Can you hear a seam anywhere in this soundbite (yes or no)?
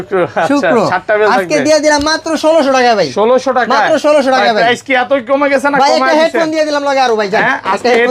no